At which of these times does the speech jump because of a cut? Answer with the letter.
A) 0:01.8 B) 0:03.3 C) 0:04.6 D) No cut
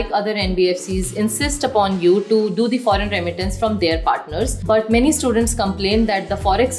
C